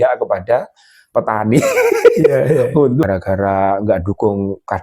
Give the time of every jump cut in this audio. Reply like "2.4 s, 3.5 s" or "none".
3.0 s